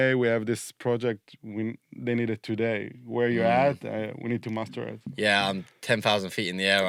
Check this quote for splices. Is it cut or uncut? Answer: uncut